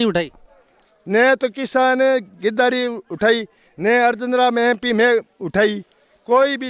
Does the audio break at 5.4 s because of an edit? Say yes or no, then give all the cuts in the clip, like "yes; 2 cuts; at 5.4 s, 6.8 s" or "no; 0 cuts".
no; 0 cuts